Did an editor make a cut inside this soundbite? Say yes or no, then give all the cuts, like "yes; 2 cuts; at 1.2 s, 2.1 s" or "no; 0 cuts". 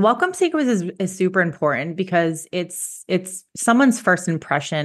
no; 0 cuts